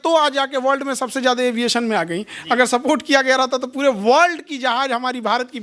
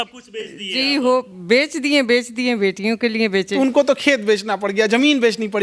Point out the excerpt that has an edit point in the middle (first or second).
second